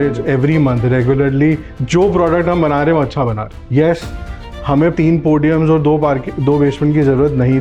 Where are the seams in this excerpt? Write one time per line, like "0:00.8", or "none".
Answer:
0:01.7